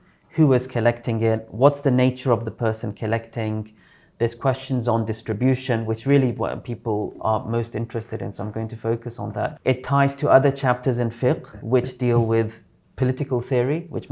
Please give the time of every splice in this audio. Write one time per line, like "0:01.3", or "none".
0:09.6